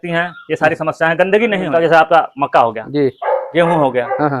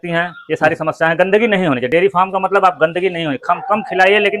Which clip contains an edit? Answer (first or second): first